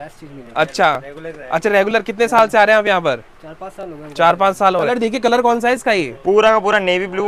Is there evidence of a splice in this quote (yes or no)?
yes